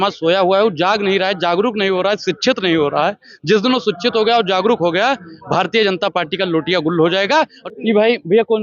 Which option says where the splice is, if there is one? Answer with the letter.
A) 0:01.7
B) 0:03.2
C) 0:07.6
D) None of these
C